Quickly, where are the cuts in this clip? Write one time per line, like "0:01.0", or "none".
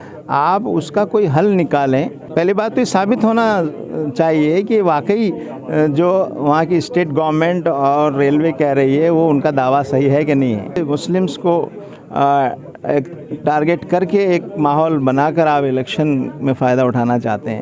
0:02.2
0:10.8